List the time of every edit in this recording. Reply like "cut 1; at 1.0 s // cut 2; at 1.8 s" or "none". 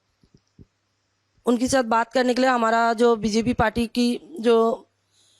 none